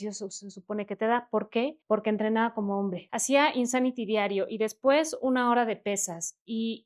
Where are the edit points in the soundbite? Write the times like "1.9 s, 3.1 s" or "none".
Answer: 1.8 s, 3.1 s